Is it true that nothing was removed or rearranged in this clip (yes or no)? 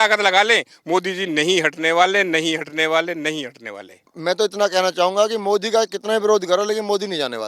no